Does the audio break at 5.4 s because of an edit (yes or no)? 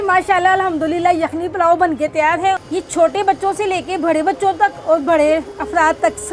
no